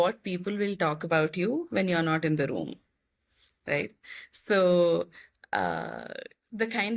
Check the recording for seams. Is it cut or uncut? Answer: uncut